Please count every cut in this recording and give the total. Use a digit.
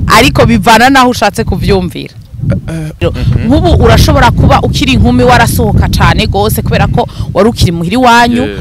1